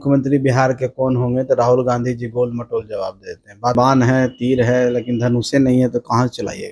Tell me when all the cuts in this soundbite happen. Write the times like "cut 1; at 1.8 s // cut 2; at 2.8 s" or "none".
cut 1; at 3.7 s